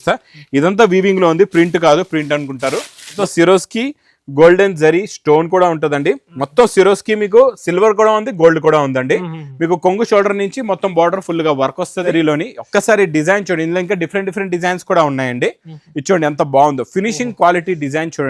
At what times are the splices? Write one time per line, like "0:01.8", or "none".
0:03.2
0:12.1